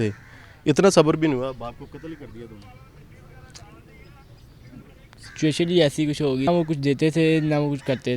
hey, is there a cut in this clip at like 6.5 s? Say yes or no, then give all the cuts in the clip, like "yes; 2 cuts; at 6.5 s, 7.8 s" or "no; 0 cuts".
yes; 1 cut; at 6.5 s